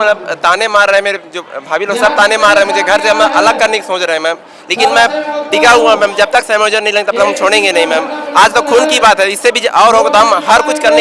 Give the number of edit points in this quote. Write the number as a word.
zero